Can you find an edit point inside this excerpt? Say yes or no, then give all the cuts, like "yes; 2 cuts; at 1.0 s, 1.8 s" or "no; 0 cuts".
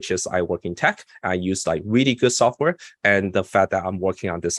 no; 0 cuts